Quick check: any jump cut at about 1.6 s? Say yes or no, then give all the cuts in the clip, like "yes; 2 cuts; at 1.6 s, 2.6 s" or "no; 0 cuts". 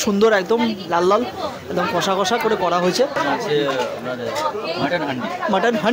no; 0 cuts